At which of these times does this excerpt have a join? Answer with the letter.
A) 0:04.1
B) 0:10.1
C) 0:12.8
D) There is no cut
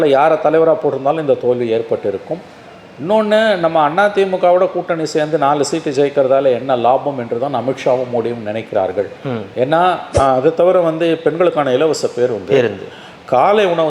B